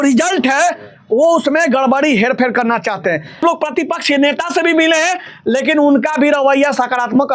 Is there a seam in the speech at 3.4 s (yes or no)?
yes